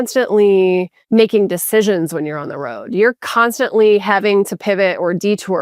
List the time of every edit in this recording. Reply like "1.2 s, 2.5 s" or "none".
1.0 s